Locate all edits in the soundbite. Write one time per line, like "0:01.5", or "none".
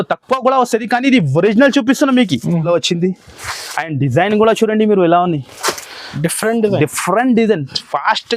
0:02.7